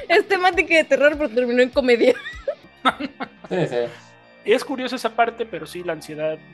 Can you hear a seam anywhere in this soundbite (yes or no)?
yes